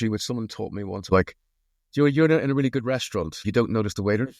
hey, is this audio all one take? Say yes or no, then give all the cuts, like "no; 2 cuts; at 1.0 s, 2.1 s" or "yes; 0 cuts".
no; 2 cuts; at 1.1 s, 3.3 s